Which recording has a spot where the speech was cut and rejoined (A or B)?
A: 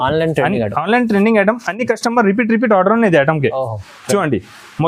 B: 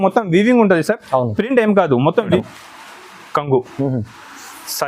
B